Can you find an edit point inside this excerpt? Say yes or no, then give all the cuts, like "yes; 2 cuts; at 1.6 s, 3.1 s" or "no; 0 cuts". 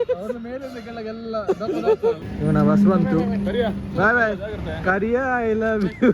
yes; 1 cut; at 2.2 s